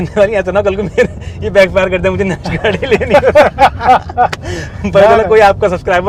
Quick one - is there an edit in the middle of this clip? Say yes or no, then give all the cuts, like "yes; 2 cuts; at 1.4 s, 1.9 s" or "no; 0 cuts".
no; 0 cuts